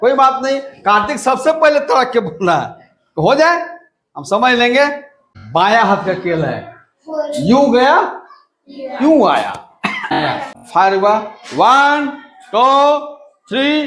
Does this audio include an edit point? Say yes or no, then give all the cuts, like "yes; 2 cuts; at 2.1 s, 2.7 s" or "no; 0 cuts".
yes; 2 cuts; at 5.3 s, 10.2 s